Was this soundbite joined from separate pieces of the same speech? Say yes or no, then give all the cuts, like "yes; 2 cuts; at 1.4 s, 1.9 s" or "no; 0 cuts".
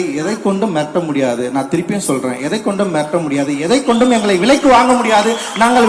no; 0 cuts